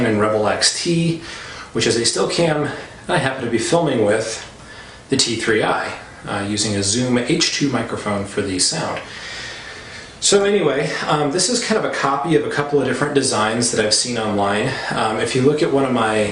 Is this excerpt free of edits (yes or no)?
no